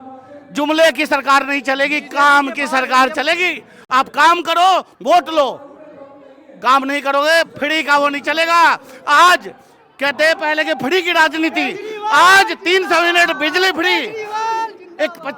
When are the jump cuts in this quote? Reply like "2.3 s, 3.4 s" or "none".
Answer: none